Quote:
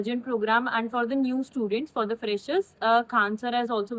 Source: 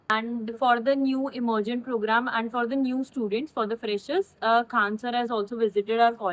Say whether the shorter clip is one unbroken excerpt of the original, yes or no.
yes